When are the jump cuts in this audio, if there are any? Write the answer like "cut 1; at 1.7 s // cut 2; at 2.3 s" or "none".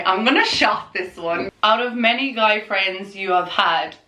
cut 1; at 1.4 s